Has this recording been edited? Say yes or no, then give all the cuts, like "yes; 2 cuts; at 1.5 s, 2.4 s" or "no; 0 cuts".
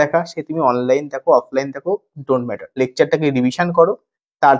yes; 1 cut; at 2.6 s